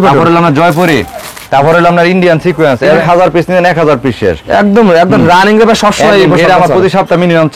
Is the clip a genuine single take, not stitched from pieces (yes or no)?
no